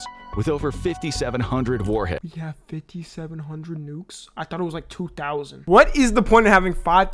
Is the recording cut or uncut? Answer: cut